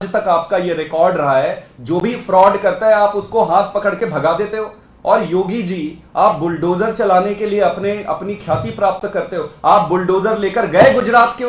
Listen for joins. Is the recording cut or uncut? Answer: uncut